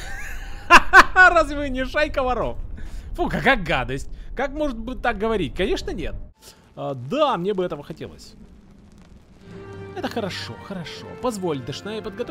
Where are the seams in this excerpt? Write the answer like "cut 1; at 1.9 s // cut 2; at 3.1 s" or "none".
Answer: cut 1; at 6.2 s

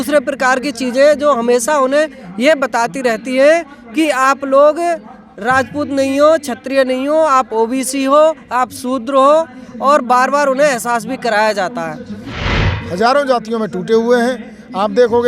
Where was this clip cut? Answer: cut 1; at 12.5 s

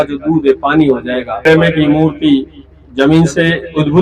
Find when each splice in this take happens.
cut 1; at 1.5 s

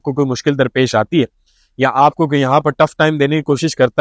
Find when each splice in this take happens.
none

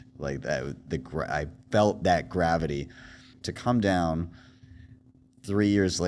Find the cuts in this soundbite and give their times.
cut 1; at 3.3 s

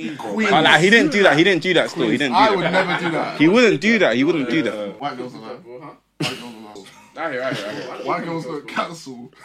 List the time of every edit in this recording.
cut 1; at 4.9 s // cut 2; at 6.9 s

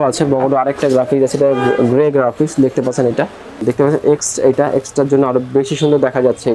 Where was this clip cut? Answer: cut 1; at 3.6 s

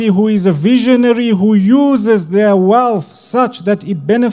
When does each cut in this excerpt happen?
none

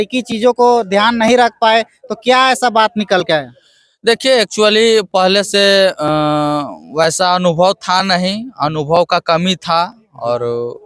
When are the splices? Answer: none

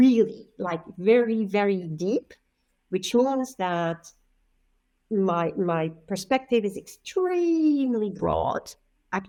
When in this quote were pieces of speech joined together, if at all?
none

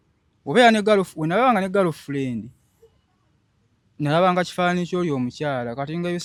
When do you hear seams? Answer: none

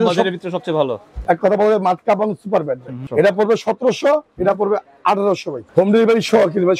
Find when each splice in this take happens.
cut 1; at 1.1 s // cut 2; at 3.0 s // cut 3; at 5.6 s

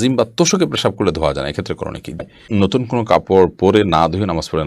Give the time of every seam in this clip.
cut 1; at 2.3 s

